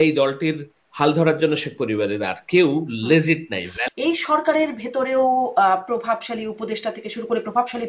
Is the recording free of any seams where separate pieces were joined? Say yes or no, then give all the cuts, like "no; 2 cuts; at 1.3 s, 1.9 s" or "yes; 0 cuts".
no; 1 cut; at 3.7 s